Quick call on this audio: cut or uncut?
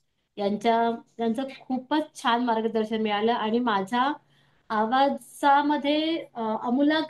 uncut